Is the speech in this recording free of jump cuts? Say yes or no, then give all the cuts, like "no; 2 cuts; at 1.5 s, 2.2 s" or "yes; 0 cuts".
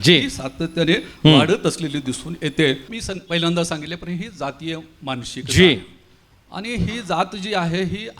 no; 1 cut; at 2.9 s